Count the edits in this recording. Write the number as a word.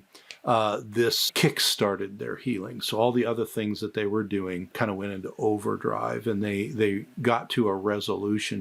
two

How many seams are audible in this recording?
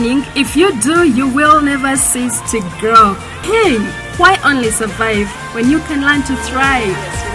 one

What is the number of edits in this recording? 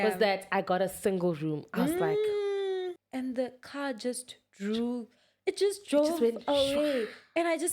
one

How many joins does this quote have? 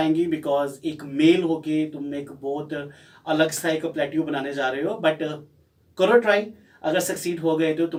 zero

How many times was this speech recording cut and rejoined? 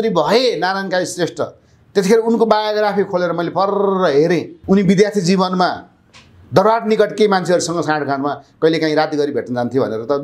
one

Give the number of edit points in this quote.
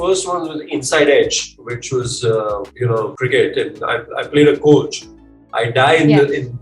one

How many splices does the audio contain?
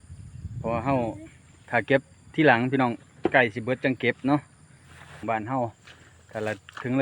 one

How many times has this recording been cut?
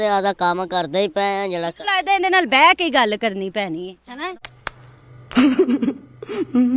zero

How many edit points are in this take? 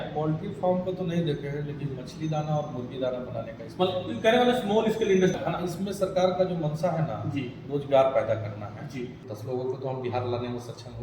two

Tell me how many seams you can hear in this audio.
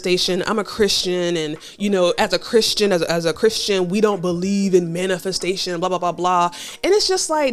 zero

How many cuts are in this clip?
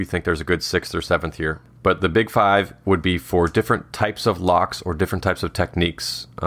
one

